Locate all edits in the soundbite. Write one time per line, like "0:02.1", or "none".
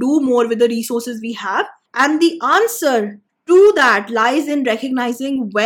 0:01.8